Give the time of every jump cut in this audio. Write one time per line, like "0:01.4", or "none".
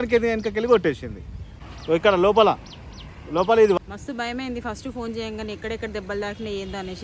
0:01.6
0:03.8

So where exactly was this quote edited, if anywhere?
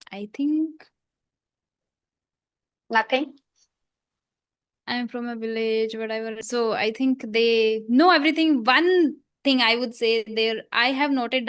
0:06.4

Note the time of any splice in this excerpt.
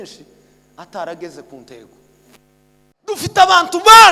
0:03.2

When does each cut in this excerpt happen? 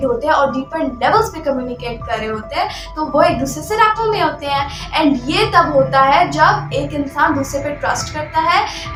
none

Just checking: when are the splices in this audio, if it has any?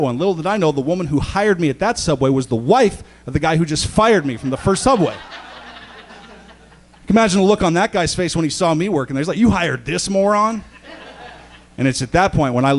none

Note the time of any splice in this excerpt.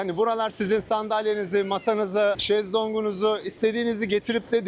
0:02.4

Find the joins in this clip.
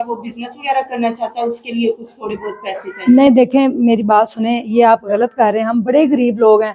none

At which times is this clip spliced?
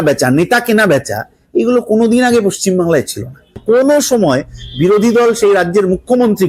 0:03.6

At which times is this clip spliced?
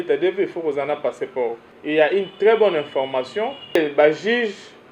0:01.7
0:03.8

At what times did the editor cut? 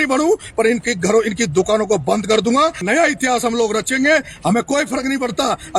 0:02.8

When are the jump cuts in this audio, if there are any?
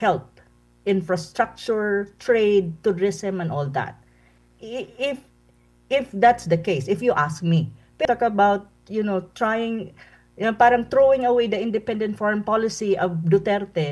0:08.0

